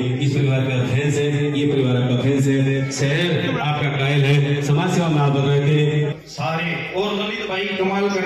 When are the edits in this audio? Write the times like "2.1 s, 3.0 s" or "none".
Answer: 6.1 s